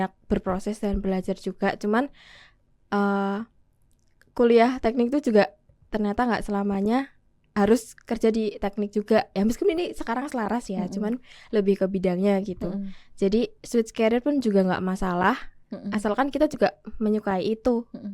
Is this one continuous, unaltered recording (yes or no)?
yes